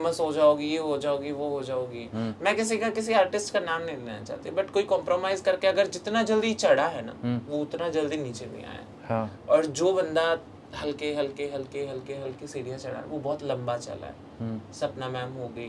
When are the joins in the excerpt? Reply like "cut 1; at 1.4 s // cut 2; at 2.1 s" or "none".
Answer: none